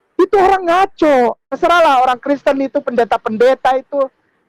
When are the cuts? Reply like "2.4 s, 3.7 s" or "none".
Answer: 1.5 s